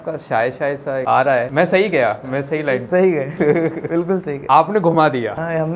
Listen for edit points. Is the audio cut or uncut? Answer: uncut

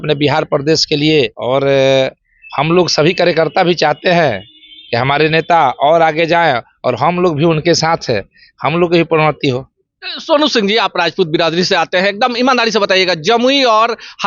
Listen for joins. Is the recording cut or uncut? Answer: uncut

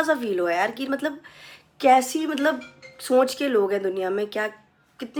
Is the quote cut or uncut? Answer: uncut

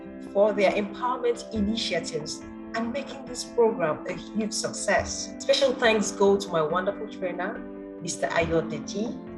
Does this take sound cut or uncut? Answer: cut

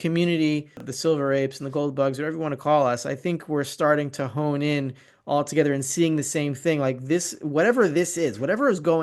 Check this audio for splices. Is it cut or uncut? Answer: cut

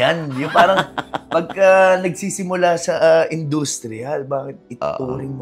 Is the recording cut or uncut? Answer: uncut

